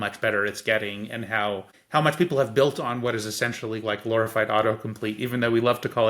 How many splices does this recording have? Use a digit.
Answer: 1